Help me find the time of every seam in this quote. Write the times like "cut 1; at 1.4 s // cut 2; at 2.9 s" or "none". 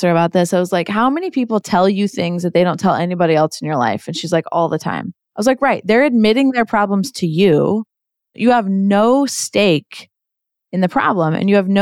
cut 1; at 8.3 s